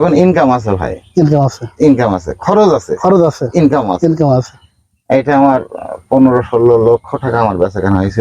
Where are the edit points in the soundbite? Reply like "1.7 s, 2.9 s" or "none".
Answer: none